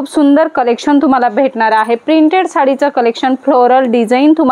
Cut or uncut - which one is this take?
uncut